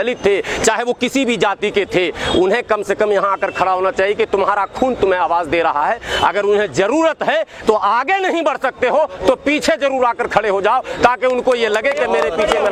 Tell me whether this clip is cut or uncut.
uncut